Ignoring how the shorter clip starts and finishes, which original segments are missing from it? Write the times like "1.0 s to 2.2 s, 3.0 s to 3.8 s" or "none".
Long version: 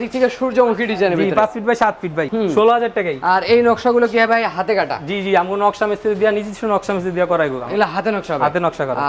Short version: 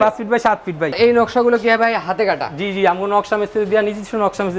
2.3 s to 3.4 s